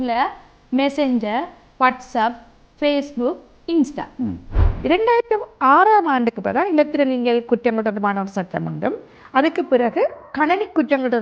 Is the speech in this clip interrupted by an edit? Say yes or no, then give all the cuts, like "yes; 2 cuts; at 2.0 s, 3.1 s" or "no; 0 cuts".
yes; 1 cut; at 4.5 s